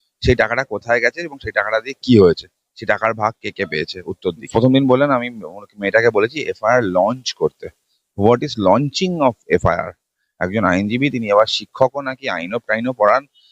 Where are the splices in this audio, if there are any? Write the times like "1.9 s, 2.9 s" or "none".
4.5 s